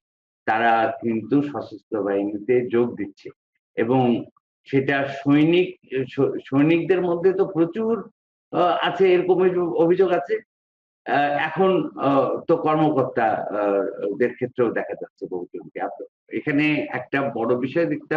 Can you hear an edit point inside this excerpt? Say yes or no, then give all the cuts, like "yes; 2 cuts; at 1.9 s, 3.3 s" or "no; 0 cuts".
yes; 1 cut; at 16.3 s